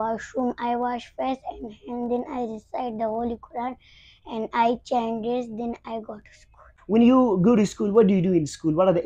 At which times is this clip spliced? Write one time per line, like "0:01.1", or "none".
0:06.8